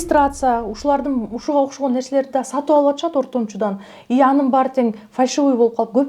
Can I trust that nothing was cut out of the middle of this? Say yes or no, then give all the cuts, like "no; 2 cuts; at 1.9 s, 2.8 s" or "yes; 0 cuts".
yes; 0 cuts